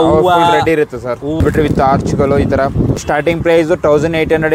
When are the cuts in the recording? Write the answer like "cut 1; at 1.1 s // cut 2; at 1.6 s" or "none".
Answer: cut 1; at 1.4 s // cut 2; at 3.0 s